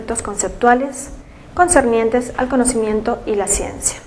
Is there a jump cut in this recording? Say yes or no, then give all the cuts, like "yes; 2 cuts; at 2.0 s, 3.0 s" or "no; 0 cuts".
no; 0 cuts